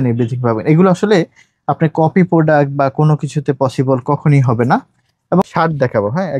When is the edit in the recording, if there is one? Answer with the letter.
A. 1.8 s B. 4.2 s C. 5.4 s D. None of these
C